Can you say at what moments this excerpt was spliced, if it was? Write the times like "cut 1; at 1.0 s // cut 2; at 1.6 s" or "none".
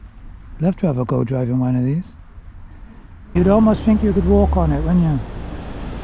cut 1; at 3.4 s

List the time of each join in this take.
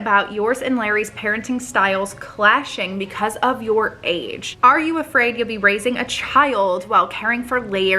cut 1; at 4.4 s

